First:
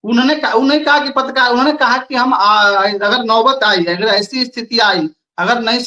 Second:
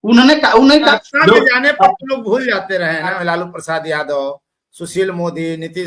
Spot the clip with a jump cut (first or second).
second